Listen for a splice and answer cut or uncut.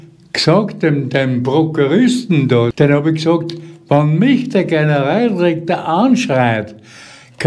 cut